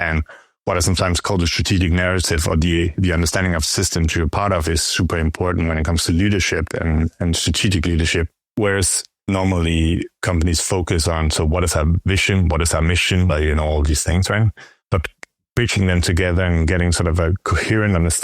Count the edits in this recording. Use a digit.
1